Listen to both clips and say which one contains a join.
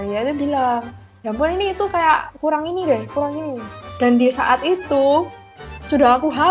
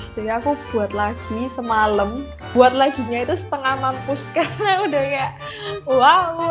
second; 1 cut; at 2.5 s

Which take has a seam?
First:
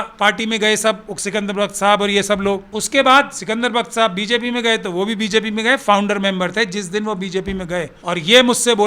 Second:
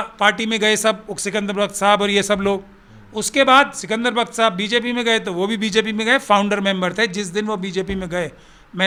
first; 2 cuts; at 2.7 s, 7.9 s

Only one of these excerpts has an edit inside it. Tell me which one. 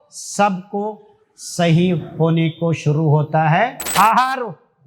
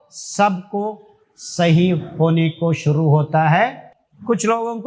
first; 1 cut; at 3.8 s

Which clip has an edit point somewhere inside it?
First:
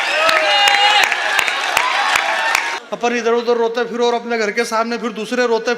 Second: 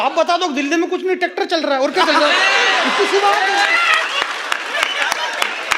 first; 1 cut; at 2.8 s

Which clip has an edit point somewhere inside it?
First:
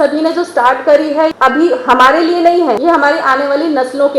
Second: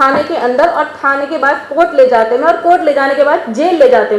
first; 2 cuts; at 1.3 s, 2.8 s

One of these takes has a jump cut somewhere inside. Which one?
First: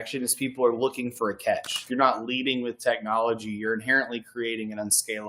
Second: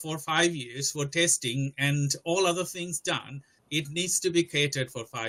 first; 1 cut; at 1.8 s

